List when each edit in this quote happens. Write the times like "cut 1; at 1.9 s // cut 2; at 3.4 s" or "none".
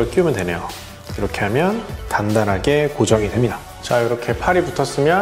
cut 1; at 3.3 s